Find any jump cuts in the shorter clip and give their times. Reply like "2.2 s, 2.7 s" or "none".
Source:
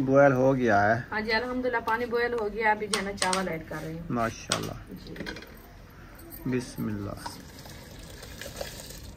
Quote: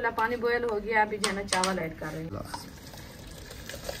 2.3 s